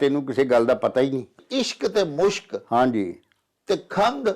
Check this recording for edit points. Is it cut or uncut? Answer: cut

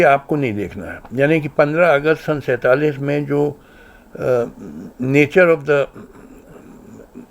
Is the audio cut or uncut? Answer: uncut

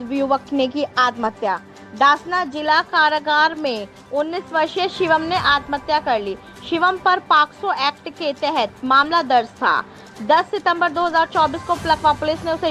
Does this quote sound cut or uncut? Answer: uncut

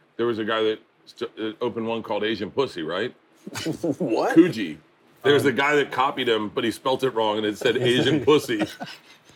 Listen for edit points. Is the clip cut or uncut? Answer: cut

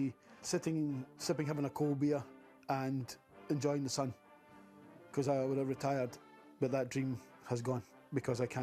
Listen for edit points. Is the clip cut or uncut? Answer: uncut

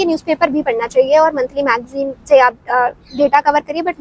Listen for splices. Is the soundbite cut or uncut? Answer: uncut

